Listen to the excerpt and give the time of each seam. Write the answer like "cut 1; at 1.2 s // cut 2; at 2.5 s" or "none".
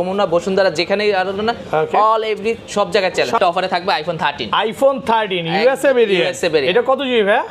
cut 1; at 3.4 s